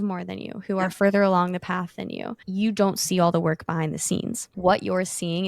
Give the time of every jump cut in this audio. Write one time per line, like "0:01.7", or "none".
0:02.4
0:04.5